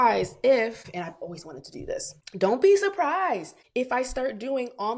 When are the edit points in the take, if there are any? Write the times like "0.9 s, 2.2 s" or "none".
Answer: 0.8 s, 2.2 s, 3.6 s